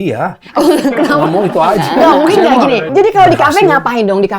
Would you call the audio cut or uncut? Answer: cut